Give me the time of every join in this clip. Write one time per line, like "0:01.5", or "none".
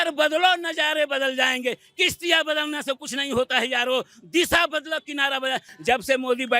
0:05.7